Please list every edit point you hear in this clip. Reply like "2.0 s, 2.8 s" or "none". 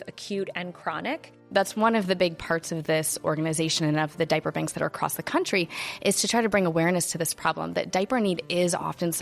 1.3 s